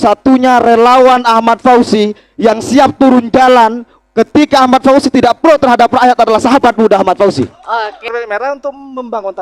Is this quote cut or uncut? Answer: cut